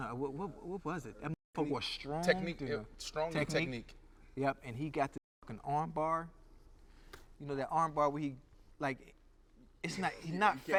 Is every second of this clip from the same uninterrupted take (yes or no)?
yes